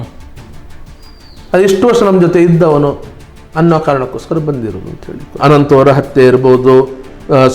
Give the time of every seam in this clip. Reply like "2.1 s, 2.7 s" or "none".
5.4 s

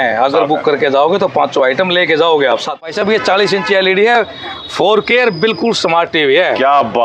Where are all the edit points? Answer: 2.9 s

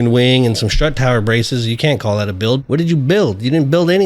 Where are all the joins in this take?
2.6 s

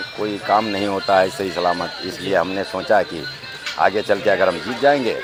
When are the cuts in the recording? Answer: none

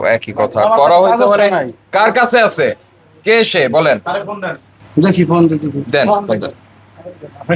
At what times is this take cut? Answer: none

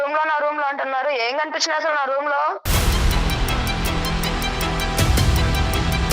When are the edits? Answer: 2.7 s

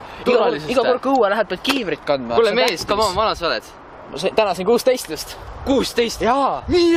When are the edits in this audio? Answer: none

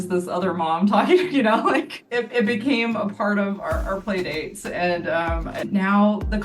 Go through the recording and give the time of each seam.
2.0 s, 5.6 s

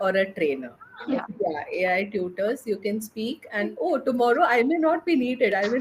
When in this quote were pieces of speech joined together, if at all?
1.2 s, 3.7 s

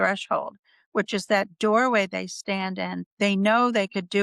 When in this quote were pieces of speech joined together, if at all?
3.0 s

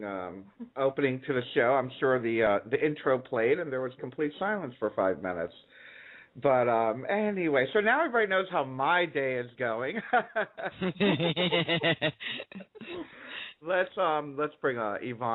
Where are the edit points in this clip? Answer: 8.0 s

